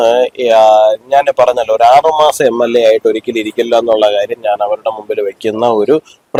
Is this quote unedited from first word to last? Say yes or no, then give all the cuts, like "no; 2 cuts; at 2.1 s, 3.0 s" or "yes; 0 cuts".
yes; 0 cuts